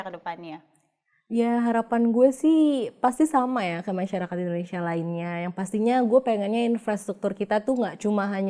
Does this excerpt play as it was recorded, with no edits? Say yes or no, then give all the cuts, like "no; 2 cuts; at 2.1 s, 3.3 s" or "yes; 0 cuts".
yes; 0 cuts